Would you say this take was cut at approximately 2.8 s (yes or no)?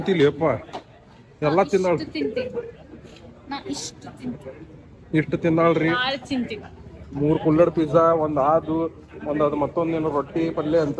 no